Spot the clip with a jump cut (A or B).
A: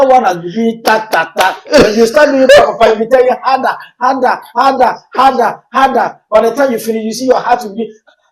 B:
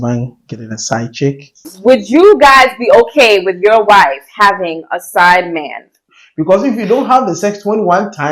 B